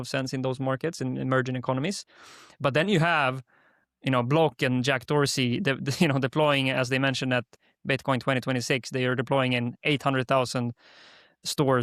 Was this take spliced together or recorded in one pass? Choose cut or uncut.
uncut